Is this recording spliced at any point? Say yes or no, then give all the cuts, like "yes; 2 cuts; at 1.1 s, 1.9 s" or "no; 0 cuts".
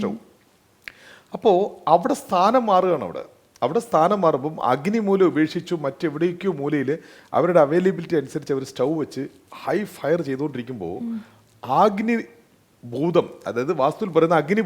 no; 0 cuts